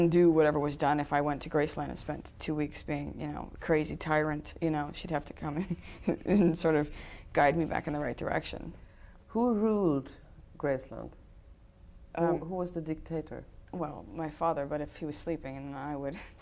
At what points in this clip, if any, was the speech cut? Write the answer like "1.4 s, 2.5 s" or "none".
none